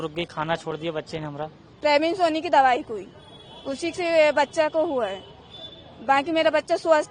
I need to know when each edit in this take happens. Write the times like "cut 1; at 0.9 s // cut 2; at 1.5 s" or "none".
cut 1; at 1.7 s